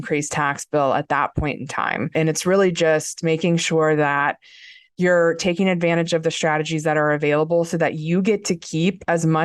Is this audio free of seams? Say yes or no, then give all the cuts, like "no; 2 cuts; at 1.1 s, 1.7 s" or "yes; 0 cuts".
no; 1 cut; at 2.1 s